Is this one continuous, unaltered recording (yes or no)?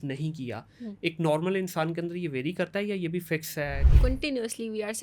no